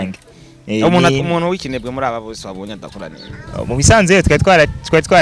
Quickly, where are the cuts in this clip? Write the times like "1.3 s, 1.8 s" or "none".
3.3 s